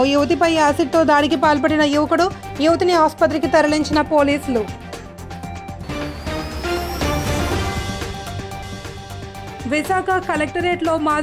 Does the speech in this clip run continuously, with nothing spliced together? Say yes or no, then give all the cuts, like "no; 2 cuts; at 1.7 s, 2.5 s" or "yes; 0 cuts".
yes; 0 cuts